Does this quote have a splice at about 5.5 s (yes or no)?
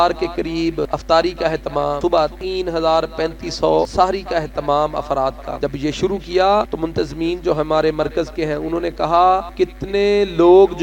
yes